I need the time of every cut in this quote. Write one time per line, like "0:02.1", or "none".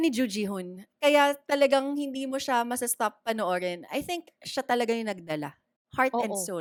none